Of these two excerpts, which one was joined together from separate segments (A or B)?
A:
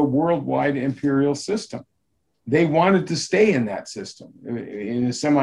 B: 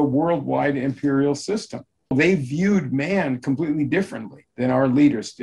B